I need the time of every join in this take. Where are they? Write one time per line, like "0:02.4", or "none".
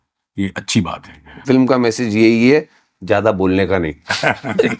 0:01.4